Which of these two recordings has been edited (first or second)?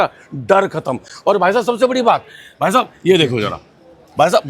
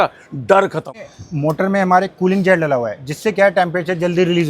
second